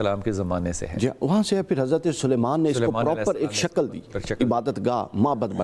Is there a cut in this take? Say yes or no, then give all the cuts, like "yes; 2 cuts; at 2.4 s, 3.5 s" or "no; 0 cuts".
no; 0 cuts